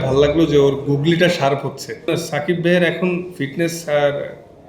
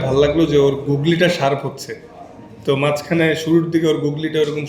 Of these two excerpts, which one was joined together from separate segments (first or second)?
first